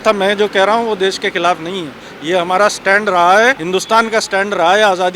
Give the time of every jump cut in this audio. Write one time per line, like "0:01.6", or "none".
0:03.6